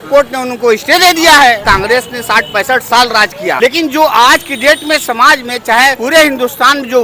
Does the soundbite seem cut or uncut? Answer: cut